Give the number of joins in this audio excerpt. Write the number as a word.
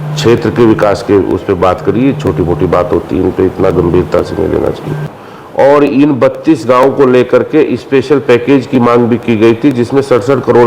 one